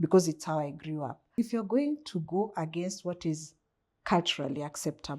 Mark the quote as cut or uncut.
cut